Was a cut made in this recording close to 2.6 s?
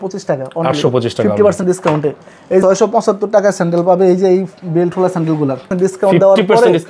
yes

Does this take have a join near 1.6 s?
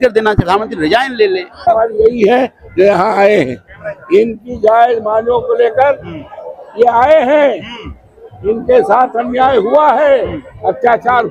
yes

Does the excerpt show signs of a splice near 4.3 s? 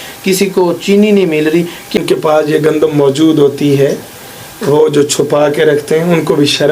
no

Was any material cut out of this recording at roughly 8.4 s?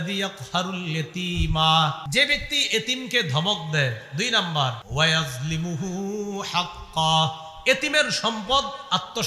no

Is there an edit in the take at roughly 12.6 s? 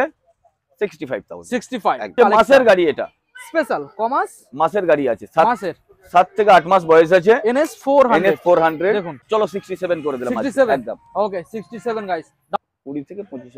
yes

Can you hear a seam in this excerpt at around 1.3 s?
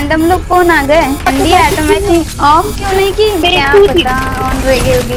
yes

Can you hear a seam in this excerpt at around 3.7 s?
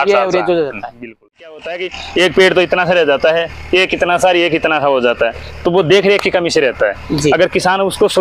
no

